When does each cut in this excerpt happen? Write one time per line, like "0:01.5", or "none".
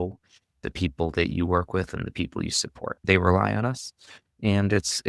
0:03.0